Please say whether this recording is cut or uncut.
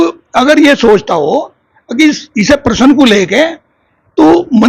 uncut